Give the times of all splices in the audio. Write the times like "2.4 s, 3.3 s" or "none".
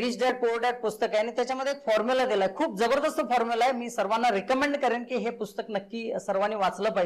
none